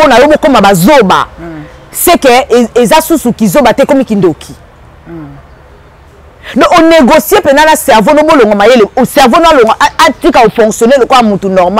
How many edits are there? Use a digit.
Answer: 0